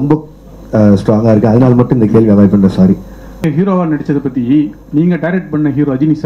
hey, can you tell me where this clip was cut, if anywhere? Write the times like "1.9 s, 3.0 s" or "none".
3.5 s